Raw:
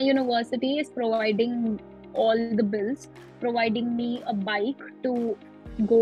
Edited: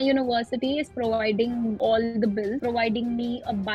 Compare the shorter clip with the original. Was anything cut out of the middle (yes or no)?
yes